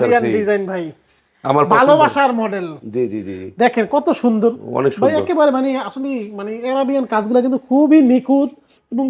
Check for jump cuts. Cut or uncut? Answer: uncut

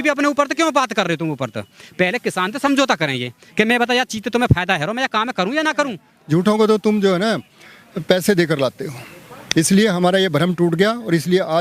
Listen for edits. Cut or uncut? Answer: cut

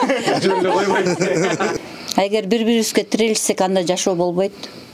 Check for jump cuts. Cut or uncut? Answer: cut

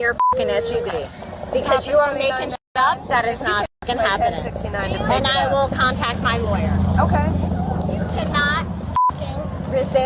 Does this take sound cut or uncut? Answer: uncut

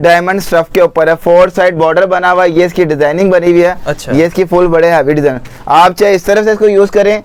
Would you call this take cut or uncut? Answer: uncut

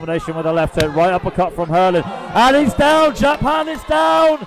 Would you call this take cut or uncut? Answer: uncut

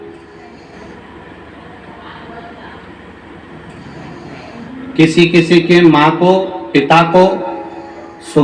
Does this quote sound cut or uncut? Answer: uncut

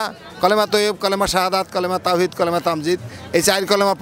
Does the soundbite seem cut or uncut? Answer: uncut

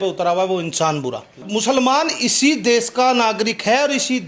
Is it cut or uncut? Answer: cut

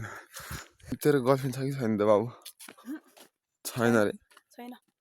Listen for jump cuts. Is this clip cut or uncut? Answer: cut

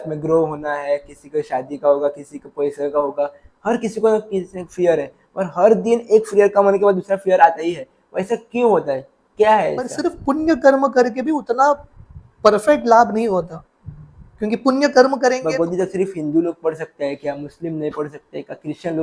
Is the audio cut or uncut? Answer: cut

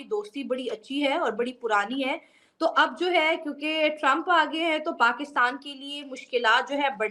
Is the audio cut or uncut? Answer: uncut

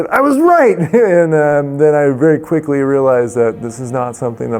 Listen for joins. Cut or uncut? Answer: uncut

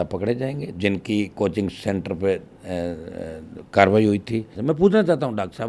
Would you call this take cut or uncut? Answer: cut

